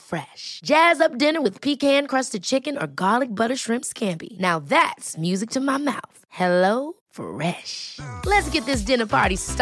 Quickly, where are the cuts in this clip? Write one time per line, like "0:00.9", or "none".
none